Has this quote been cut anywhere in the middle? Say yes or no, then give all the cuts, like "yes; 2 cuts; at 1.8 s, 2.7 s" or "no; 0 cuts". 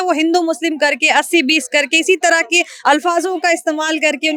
no; 0 cuts